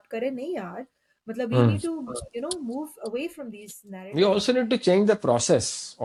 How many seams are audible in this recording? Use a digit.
0